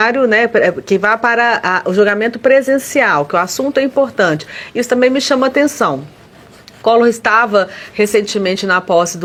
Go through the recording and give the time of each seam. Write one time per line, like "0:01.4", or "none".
none